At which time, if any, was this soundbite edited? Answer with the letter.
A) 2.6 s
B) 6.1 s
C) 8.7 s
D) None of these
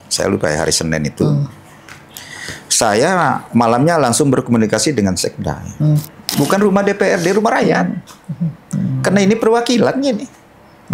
B